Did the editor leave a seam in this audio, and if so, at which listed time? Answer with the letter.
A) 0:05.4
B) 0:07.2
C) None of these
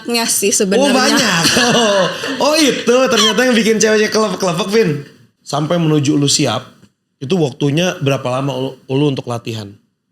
A